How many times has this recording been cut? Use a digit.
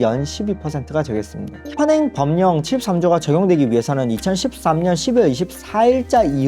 1